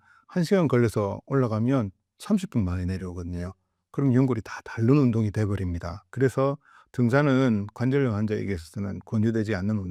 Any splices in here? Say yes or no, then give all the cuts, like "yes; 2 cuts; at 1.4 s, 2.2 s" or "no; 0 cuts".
no; 0 cuts